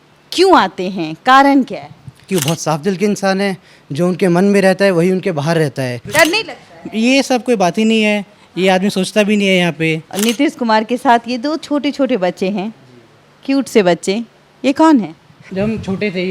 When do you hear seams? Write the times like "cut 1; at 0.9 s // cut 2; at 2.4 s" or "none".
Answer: cut 1; at 2.3 s // cut 2; at 6.1 s // cut 3; at 10.1 s // cut 4; at 15.4 s